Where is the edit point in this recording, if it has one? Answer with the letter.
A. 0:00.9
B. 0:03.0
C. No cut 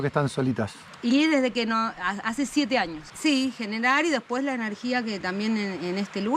B